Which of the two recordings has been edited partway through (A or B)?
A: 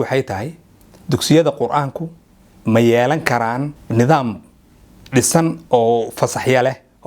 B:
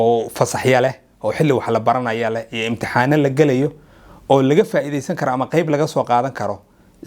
A